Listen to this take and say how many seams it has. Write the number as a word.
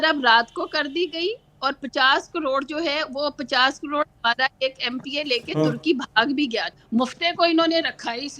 one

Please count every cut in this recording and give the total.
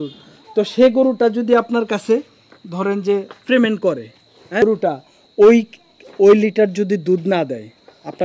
one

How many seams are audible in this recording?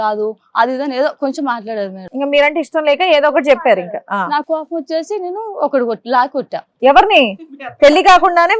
zero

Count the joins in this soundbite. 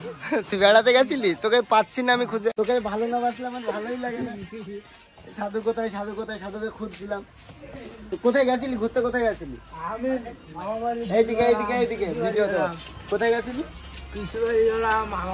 zero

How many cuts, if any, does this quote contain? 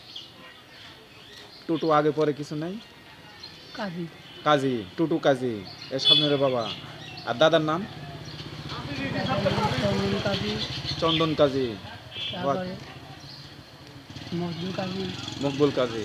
zero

